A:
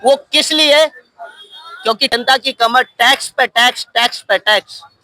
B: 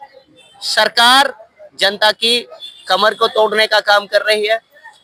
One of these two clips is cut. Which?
A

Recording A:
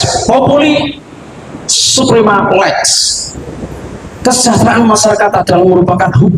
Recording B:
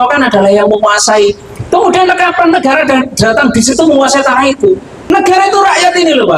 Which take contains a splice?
B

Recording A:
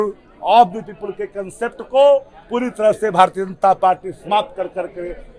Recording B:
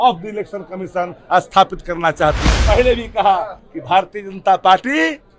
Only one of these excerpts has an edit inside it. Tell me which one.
B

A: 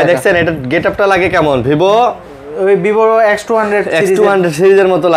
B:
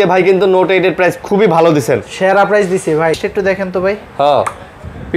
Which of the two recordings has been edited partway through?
B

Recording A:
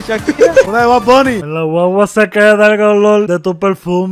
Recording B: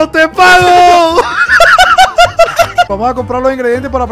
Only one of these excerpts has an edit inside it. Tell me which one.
B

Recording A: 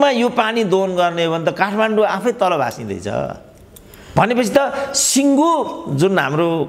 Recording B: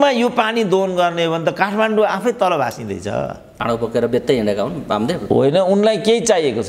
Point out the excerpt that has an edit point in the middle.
B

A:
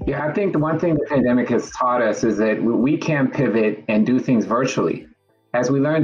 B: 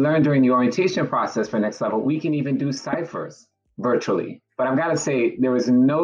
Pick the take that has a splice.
B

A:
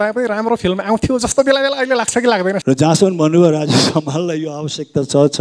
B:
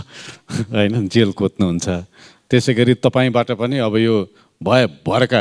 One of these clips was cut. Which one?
A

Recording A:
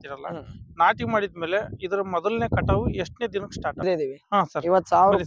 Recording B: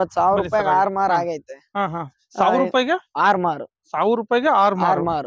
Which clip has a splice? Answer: A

